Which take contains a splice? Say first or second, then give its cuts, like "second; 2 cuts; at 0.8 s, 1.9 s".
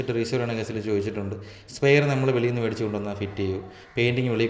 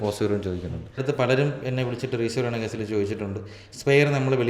second; 1 cut; at 1.0 s